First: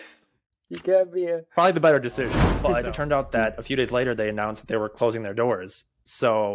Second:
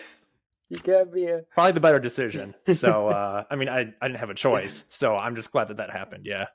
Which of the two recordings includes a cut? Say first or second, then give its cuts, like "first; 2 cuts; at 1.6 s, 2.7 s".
first; 1 cut; at 2.4 s